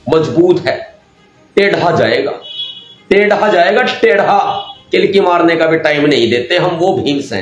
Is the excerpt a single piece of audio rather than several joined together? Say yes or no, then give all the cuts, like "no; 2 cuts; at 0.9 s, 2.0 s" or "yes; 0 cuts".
yes; 0 cuts